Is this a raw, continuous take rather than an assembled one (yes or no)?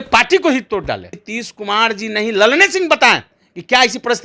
no